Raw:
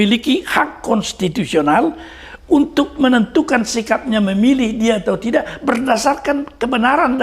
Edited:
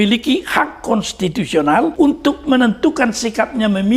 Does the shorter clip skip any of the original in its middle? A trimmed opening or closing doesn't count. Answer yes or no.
yes